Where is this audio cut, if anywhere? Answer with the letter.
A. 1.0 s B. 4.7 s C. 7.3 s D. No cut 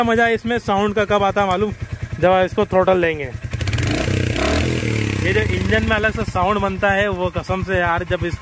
D